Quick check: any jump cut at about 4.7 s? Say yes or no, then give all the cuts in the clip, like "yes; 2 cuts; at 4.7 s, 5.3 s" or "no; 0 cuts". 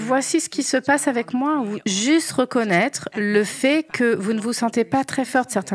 no; 0 cuts